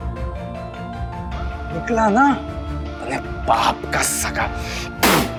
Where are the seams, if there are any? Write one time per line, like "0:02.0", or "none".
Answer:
none